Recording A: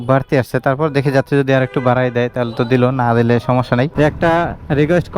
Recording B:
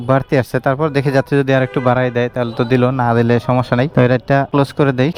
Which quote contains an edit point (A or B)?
A